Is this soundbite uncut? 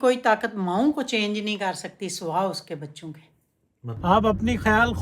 no; 1 cut; at 3.9 s

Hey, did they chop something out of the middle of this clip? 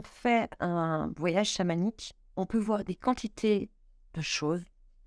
yes; 1 cut; at 2.2 s

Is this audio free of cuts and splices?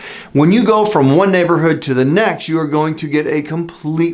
yes; 0 cuts

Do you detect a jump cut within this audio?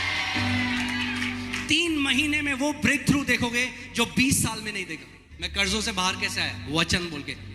yes; 1 cut; at 5.5 s

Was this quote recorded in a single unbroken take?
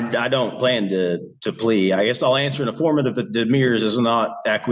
yes; 0 cuts

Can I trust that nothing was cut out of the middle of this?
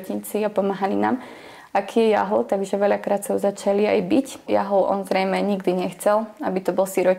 no; 1 cut; at 4.5 s

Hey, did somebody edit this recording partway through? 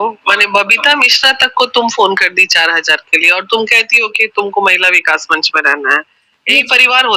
no; 0 cuts

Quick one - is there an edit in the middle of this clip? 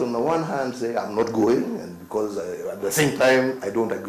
no; 0 cuts

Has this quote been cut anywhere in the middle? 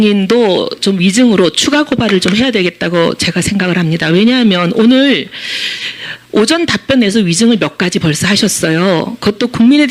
yes; 1 cut; at 2.8 s

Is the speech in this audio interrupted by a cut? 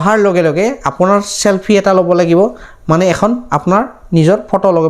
no; 0 cuts

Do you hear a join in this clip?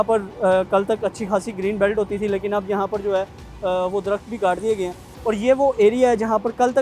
no; 0 cuts

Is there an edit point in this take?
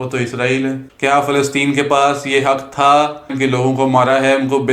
yes; 2 cuts; at 0.9 s, 3.3 s

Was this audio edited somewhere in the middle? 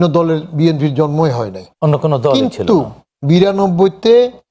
no; 0 cuts

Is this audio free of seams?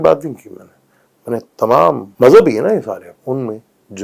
no; 2 cuts; at 2.1 s, 3.1 s

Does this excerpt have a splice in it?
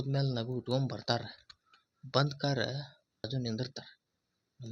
yes; 1 cut; at 3.3 s

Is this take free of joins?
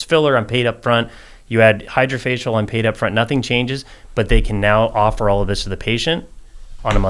yes; 0 cuts

